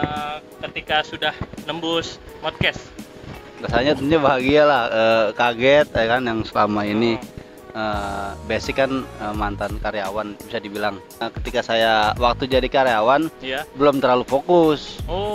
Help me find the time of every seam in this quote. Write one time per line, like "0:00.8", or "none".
0:11.2